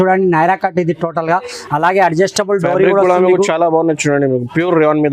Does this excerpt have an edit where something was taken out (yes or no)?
no